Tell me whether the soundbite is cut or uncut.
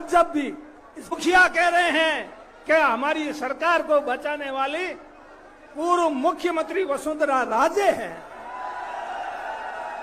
cut